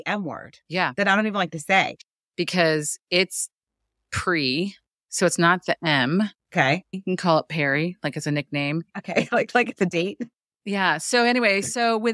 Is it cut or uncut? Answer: uncut